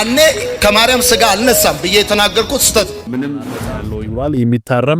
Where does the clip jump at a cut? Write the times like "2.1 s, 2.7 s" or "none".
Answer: 3.5 s